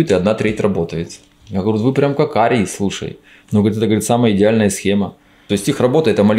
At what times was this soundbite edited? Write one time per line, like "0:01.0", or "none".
0:05.3